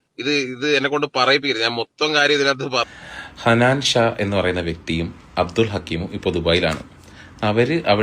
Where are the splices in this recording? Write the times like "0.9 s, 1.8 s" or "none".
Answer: 2.9 s